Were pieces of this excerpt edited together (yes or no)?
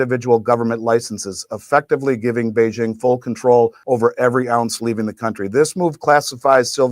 yes